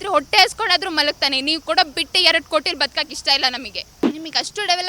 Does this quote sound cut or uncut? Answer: cut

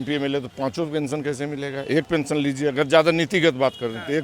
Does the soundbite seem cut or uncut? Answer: uncut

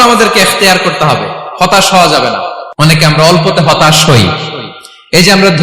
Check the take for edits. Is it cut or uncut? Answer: cut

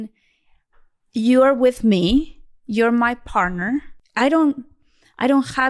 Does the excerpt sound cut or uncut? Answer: cut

